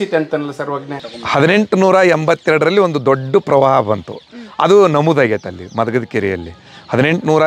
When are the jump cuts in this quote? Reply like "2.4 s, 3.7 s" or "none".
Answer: 1.2 s